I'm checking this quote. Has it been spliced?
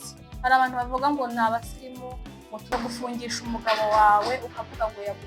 yes; 1 cut; at 2.7 s

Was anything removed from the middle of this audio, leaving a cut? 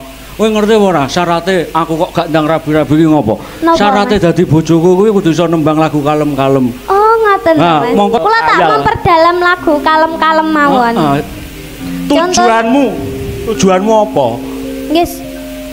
yes; 1 cut; at 8.2 s

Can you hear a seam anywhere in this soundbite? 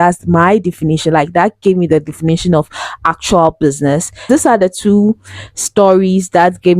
yes; 1 cut; at 4.2 s

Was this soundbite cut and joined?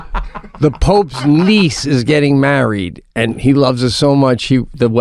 no; 0 cuts

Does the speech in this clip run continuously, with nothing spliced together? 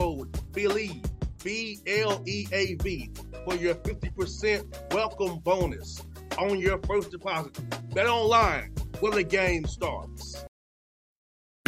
no; 1 cut; at 10.4 s

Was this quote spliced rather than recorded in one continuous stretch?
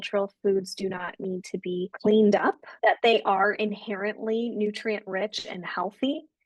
yes; 1 cut; at 2.7 s

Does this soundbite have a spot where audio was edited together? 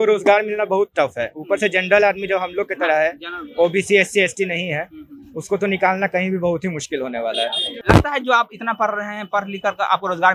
yes; 1 cut; at 7.7 s

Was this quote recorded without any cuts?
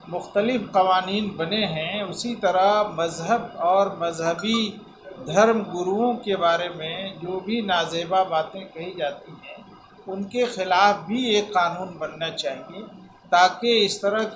yes; 0 cuts

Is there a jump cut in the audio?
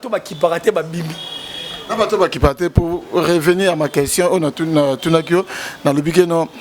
no; 0 cuts

